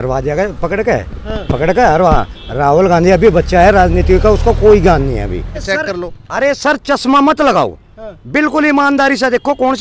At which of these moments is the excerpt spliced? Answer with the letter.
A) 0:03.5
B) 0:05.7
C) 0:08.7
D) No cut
B